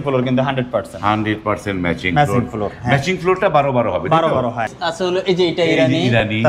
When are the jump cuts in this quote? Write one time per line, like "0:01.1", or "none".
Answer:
0:04.8